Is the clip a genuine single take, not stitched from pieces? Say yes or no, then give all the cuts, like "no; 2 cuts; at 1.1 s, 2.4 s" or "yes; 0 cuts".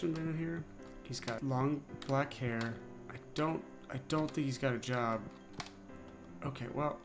yes; 0 cuts